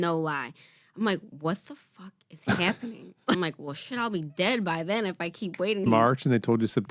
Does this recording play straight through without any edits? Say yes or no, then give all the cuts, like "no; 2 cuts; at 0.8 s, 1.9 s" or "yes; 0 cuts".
no; 2 cuts; at 3.3 s, 5.9 s